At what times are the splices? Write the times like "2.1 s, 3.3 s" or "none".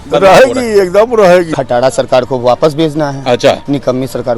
1.6 s